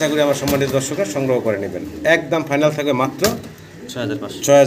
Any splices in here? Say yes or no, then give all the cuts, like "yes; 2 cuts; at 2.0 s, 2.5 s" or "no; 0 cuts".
no; 0 cuts